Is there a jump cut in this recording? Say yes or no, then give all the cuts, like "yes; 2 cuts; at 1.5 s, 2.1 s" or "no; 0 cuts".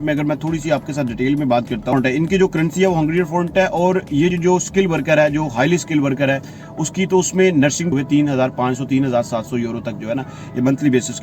yes; 3 cuts; at 1.9 s, 4.3 s, 7.9 s